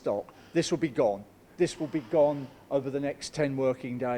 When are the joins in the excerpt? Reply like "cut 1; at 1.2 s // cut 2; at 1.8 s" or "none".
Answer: cut 1; at 1.4 s